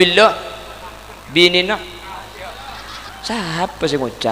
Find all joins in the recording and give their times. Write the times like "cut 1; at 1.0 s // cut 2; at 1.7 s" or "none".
cut 1; at 3.1 s